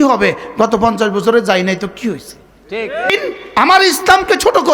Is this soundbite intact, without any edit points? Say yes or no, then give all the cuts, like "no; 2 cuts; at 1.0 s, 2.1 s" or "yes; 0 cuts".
no; 1 cut; at 3.1 s